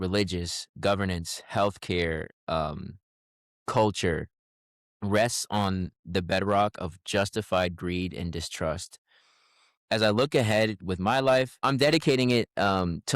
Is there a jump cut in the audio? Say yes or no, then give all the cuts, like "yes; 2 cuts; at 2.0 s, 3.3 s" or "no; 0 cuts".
yes; 1 cut; at 11.6 s